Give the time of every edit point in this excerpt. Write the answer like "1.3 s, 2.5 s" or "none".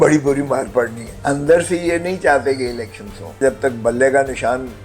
1.1 s, 3.4 s